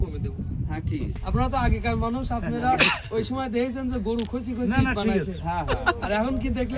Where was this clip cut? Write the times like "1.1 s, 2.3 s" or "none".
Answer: 1.2 s